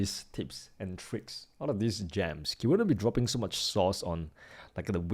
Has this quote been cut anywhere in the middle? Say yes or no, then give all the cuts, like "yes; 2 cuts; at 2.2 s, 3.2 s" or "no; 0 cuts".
no; 0 cuts